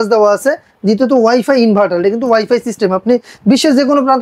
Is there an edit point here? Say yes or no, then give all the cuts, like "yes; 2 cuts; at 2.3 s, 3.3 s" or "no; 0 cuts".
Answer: no; 0 cuts